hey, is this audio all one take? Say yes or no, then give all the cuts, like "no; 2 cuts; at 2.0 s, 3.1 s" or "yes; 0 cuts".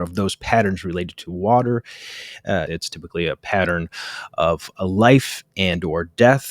no; 1 cut; at 2.7 s